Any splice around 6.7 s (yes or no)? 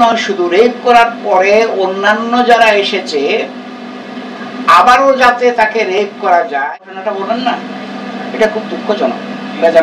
yes